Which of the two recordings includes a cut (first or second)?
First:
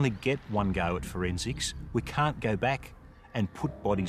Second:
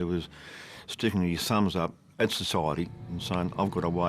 second